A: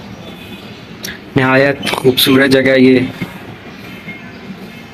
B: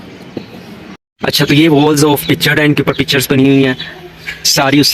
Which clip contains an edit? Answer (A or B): B